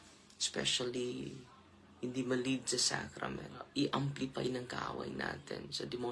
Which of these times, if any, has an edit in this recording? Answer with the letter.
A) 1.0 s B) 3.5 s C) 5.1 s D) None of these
B